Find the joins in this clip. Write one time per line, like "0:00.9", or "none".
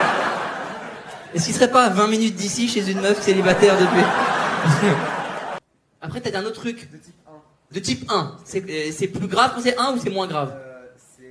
0:05.5